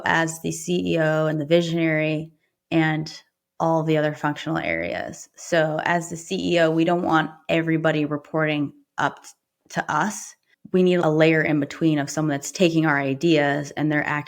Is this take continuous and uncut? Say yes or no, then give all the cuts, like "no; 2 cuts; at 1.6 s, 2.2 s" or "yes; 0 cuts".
no; 1 cut; at 11.0 s